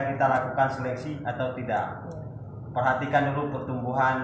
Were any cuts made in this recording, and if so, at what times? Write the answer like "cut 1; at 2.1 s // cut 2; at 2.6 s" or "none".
none

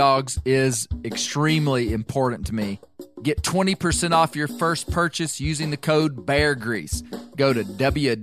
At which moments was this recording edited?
cut 1; at 3.0 s

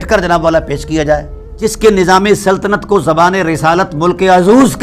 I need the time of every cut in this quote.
cut 1; at 1.4 s

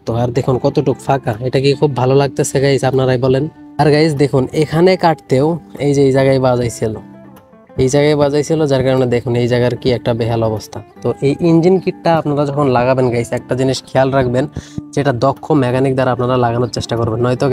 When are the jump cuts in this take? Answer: none

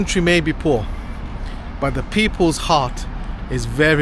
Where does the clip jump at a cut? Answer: none

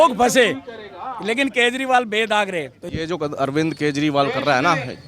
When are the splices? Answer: cut 1; at 2.8 s

